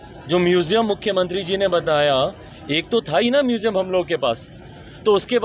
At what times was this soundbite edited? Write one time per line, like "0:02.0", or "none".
none